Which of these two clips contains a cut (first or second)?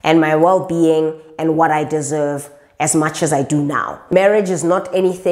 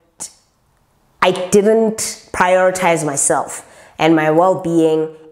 first